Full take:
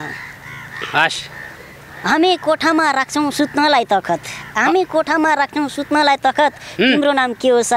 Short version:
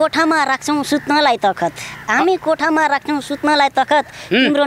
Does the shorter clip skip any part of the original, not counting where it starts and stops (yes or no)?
no